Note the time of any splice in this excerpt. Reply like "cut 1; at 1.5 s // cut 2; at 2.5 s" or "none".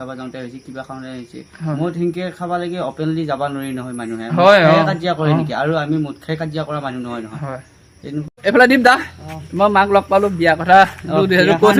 cut 1; at 8.2 s